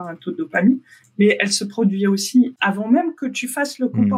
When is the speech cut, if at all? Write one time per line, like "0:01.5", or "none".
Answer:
0:02.5